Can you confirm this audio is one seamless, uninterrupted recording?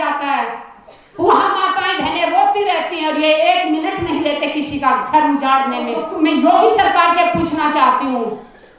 no; 1 cut; at 6.0 s

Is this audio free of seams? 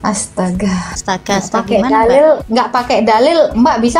no; 2 cuts; at 1.0 s, 2.4 s

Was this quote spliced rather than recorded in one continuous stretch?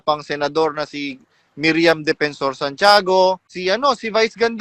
yes; 1 cut; at 3.5 s

